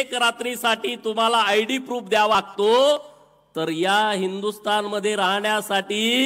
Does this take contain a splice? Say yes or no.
yes